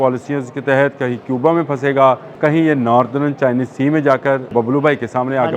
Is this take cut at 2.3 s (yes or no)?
yes